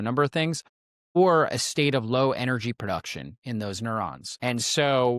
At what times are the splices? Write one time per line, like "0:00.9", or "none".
0:04.2